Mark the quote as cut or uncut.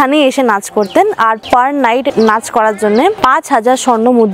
uncut